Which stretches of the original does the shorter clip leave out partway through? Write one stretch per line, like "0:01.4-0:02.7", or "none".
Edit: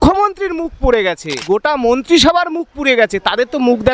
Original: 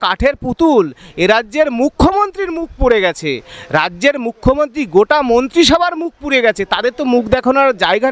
0:03.4-0:04.9